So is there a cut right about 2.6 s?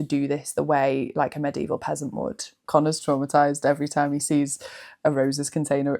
yes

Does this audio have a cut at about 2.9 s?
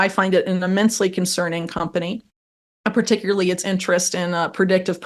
no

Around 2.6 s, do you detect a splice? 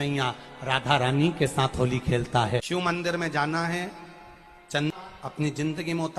yes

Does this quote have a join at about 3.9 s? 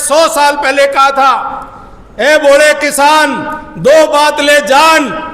no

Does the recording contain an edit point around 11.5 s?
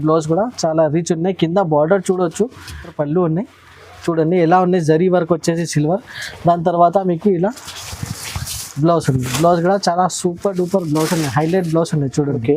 no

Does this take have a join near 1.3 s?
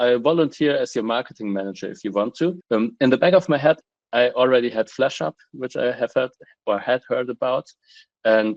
no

